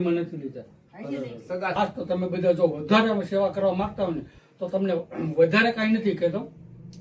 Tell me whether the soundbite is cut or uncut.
cut